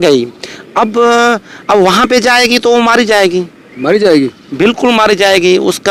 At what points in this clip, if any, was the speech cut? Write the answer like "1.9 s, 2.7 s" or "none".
none